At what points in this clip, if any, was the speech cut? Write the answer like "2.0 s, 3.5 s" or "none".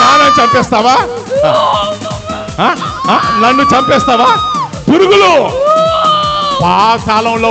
none